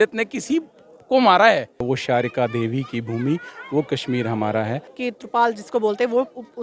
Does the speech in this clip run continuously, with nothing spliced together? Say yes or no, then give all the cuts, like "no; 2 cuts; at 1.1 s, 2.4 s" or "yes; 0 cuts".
no; 2 cuts; at 1.8 s, 4.9 s